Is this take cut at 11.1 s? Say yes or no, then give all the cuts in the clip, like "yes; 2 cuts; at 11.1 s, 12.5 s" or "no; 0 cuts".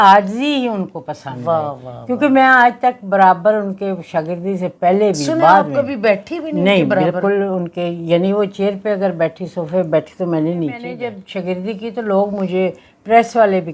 yes; 1 cut; at 11.1 s